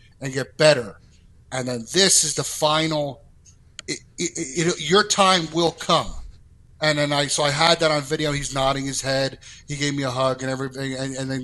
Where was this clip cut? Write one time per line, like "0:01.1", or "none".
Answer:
none